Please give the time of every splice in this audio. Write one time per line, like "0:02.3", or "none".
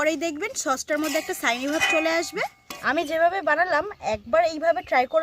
0:02.7